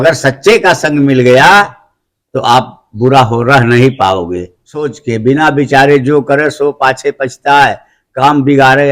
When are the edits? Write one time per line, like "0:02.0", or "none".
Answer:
0:04.9